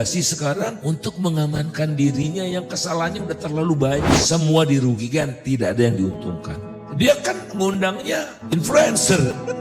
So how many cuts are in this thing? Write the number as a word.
one